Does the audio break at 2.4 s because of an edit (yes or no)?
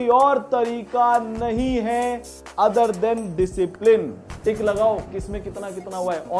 no